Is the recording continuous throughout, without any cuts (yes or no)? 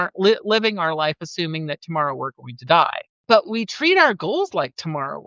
no